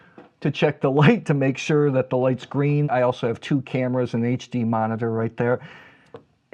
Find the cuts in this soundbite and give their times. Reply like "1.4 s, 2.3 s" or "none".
2.9 s, 5.7 s